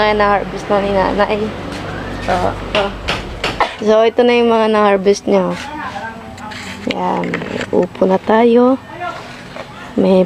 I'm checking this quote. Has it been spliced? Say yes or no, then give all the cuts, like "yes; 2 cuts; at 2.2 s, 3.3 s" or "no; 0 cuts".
yes; 1 cut; at 3.8 s